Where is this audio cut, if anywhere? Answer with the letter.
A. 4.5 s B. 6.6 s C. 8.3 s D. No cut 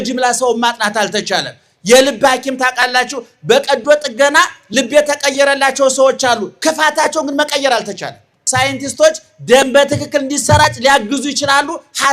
C